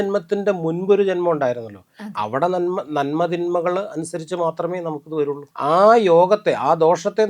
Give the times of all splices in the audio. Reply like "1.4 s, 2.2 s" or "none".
5.5 s